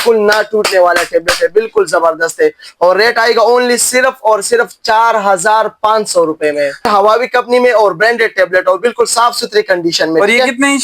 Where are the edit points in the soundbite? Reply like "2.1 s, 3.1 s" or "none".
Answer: 6.9 s